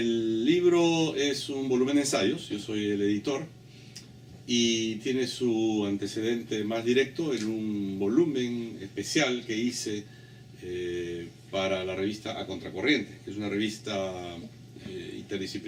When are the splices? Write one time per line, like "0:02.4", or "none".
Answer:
none